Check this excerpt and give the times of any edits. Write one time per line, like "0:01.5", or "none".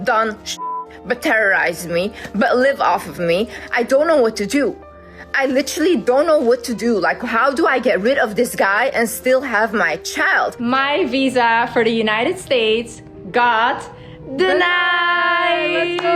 0:03.6
0:10.6